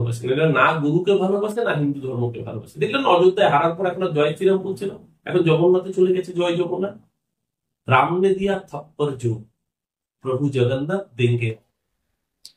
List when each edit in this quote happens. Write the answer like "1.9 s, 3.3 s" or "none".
none